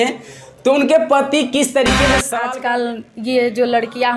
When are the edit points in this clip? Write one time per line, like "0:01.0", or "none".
0:02.2